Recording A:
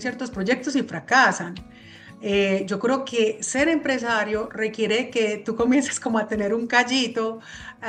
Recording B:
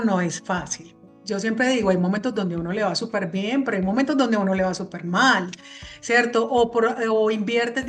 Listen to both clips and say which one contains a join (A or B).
B